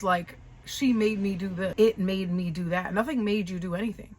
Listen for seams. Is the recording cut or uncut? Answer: cut